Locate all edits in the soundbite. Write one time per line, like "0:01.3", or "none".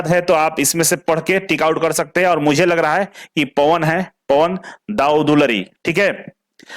none

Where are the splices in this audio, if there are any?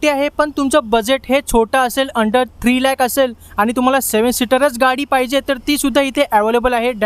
none

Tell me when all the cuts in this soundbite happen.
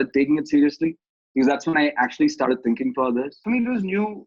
0:03.4

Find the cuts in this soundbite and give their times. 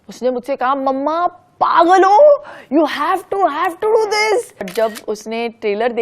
0:04.7

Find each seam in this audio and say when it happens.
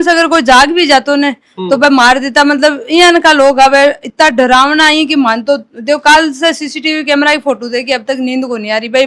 none

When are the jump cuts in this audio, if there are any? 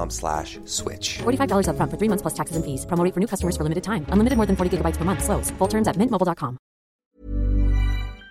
0:07.0

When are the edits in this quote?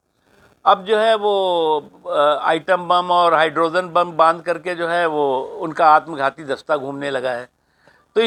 none

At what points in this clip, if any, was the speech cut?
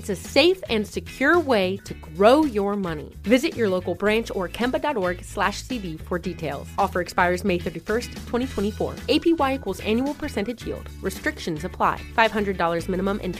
none

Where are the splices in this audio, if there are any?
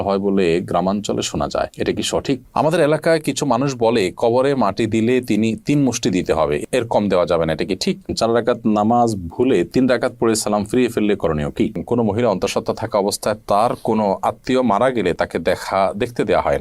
0:02.5
0:08.1
0:11.8

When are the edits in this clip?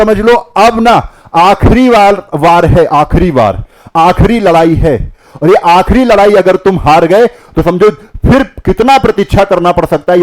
none

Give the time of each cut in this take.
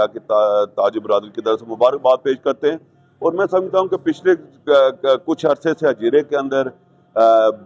none

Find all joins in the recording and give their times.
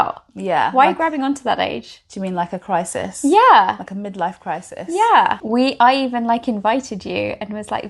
0:05.4

